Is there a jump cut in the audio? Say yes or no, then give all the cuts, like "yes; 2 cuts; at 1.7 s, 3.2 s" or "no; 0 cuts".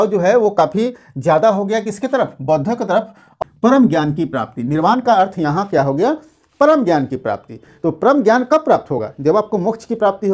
yes; 1 cut; at 3.4 s